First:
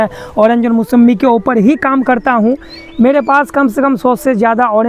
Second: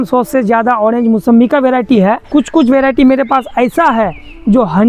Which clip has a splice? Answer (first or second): second